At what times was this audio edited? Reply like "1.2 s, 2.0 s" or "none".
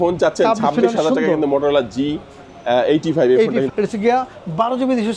3.7 s